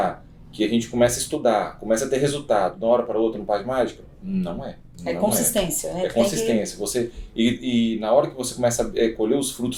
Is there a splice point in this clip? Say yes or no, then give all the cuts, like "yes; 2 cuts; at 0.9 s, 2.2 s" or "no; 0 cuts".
no; 0 cuts